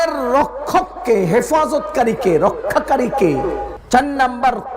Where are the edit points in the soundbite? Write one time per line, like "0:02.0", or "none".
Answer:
0:03.7